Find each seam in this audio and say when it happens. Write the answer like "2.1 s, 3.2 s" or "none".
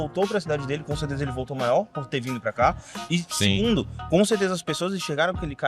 none